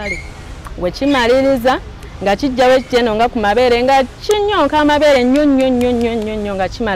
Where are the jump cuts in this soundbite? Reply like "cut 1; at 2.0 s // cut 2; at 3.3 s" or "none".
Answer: none

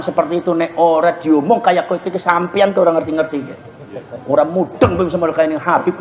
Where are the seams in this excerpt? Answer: none

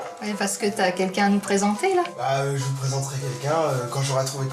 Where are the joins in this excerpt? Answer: none

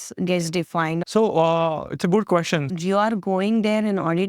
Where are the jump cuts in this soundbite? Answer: cut 1; at 1.0 s // cut 2; at 2.7 s

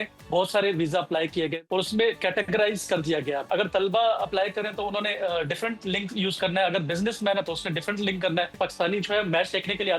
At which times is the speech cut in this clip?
cut 1; at 1.6 s // cut 2; at 3.5 s // cut 3; at 8.5 s

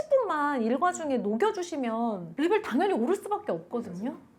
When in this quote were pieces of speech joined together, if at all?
cut 1; at 2.3 s

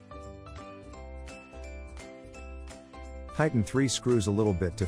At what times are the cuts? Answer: cut 1; at 3.4 s

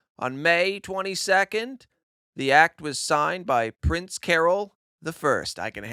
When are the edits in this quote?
none

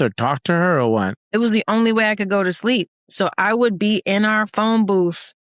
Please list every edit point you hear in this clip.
cut 1; at 1.2 s

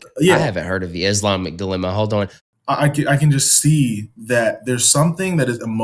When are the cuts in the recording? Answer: cut 1; at 2.4 s

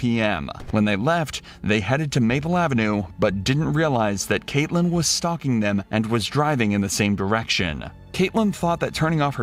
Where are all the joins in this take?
none

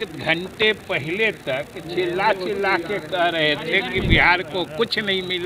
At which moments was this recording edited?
none

